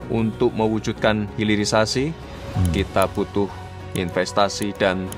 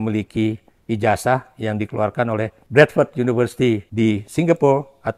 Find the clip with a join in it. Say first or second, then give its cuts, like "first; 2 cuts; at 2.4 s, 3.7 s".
second; 2 cuts; at 2.6 s, 3.9 s